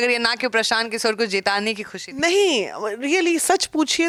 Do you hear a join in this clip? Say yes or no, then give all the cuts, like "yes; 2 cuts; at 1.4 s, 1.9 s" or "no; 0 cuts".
no; 0 cuts